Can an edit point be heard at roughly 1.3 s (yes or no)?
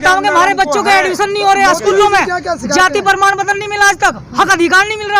yes